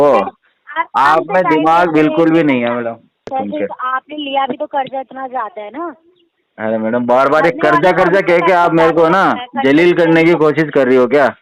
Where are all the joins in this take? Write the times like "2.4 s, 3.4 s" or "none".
3.3 s